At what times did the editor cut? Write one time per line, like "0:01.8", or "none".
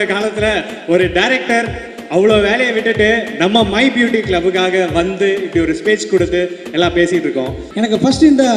0:07.6